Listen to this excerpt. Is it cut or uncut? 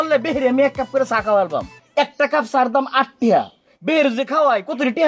cut